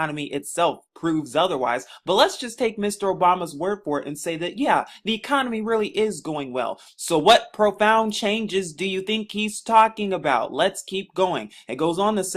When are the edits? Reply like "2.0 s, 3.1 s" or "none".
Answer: 11.1 s